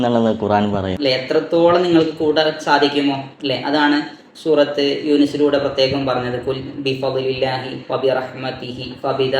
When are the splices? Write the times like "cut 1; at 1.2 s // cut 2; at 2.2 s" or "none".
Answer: cut 1; at 0.9 s